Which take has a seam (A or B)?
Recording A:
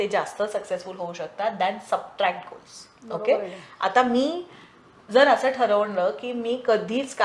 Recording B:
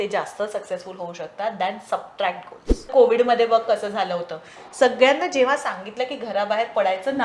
B